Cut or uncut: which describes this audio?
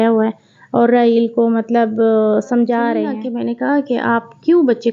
cut